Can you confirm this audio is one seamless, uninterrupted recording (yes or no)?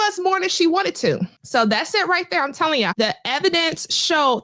no